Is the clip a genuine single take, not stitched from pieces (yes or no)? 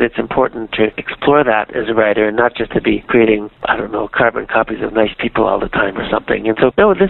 yes